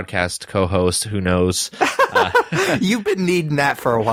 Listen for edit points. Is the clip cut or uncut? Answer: uncut